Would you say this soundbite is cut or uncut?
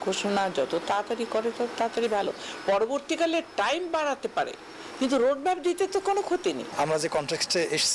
cut